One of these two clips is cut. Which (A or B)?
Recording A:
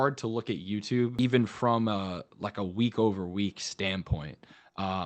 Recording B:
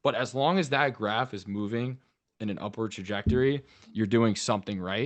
A